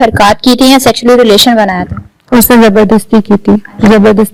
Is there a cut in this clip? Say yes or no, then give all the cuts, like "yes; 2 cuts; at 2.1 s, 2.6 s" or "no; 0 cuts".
no; 0 cuts